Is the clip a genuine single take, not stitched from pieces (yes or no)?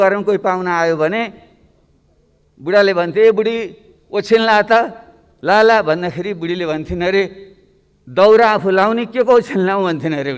yes